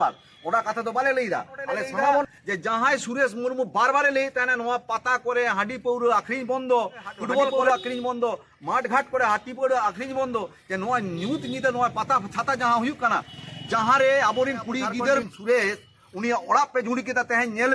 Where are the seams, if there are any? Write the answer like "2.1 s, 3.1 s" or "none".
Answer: 2.3 s, 7.6 s, 15.2 s